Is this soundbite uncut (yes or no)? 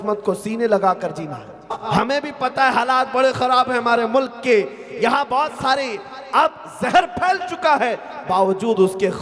no